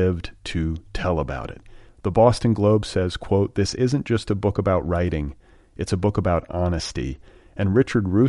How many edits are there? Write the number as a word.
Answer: zero